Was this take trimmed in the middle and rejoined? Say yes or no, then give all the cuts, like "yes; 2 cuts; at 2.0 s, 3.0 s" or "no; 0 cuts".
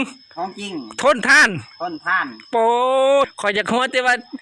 yes; 1 cut; at 3.3 s